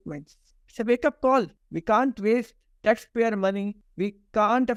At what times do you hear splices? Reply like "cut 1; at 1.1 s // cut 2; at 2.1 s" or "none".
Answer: none